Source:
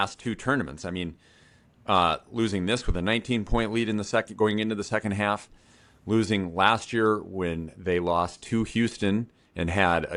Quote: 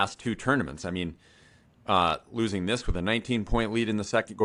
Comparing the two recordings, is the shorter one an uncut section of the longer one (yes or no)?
yes